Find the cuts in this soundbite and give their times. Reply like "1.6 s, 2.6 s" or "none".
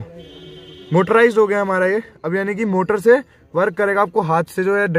none